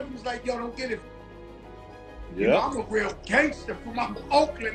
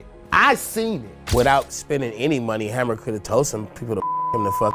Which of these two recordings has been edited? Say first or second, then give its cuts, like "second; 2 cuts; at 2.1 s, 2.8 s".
second; 1 cut; at 1.2 s